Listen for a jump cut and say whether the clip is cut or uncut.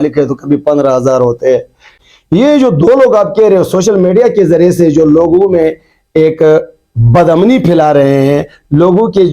cut